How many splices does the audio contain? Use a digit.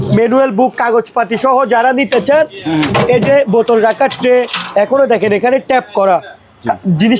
0